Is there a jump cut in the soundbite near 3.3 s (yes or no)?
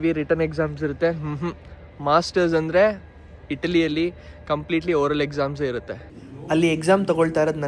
no